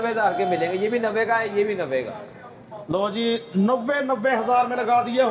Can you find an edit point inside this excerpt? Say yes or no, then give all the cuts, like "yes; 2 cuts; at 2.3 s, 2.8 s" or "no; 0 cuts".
no; 0 cuts